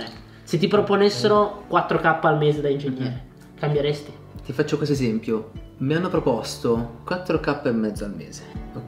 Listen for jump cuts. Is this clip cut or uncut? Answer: cut